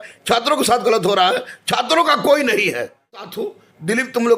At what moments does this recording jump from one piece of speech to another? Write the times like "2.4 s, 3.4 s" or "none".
3.4 s